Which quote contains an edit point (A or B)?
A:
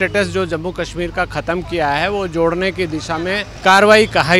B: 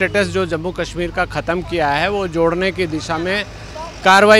A